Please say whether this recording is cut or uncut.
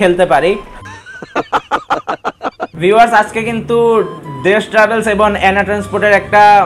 cut